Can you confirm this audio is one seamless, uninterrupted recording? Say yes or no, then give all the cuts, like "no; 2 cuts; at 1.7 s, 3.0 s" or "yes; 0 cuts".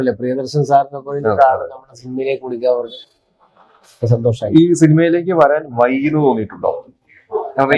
yes; 0 cuts